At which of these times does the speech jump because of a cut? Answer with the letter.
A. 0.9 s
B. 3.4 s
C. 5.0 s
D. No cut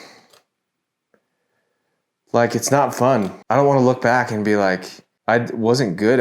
B